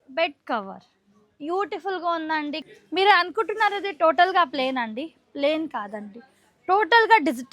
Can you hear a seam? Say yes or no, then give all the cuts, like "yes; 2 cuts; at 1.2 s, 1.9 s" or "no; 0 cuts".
yes; 1 cut; at 2.8 s